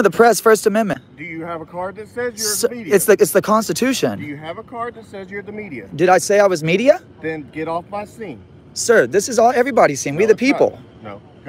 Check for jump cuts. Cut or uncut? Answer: uncut